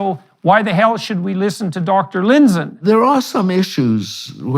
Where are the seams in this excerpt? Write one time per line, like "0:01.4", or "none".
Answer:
0:02.7